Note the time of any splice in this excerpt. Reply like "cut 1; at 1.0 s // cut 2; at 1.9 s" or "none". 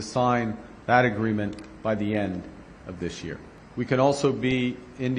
cut 1; at 3.5 s

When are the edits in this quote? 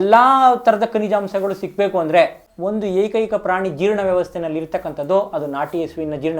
cut 1; at 2.5 s

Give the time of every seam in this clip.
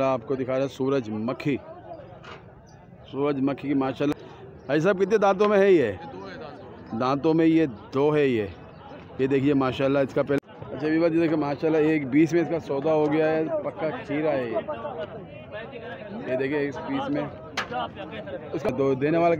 cut 1; at 4.1 s // cut 2; at 10.4 s // cut 3; at 18.7 s

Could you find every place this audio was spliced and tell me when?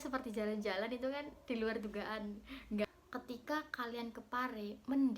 cut 1; at 2.8 s

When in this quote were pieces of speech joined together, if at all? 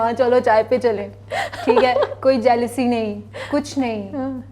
none

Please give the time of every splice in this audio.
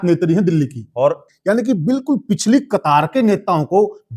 cut 1; at 1.3 s

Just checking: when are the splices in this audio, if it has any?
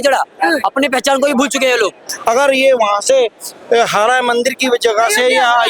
cut 1; at 2.0 s

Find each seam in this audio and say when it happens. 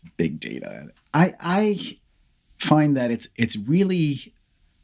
none

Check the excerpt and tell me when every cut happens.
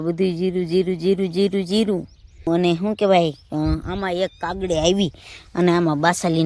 cut 1; at 2.5 s

